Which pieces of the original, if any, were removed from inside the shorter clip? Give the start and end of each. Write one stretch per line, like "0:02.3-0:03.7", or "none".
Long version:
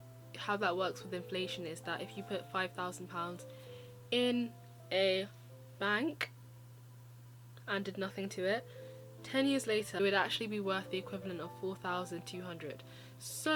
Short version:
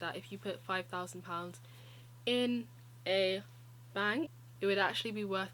0:06.4-0:09.9